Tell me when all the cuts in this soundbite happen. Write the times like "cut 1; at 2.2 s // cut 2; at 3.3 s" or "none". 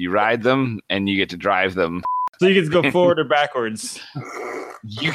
cut 1; at 2.2 s